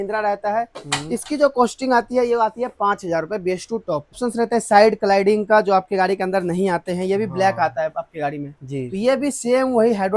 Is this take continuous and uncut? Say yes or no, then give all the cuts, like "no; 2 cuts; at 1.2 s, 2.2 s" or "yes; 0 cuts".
no; 1 cut; at 4.2 s